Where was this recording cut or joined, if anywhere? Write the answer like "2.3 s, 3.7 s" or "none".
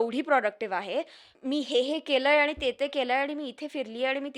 1.3 s